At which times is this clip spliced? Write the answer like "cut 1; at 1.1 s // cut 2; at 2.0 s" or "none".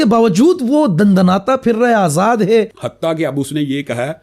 cut 1; at 2.8 s